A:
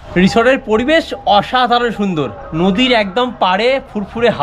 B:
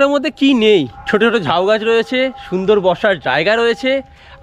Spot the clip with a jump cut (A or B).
B